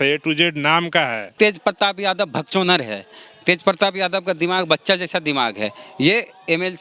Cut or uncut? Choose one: cut